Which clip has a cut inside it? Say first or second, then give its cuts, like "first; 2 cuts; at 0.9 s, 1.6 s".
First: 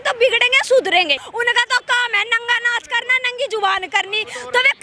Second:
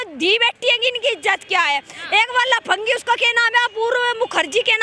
first; 1 cut; at 1.2 s